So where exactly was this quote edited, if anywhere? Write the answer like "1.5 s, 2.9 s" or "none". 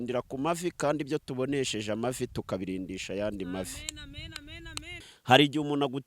5.0 s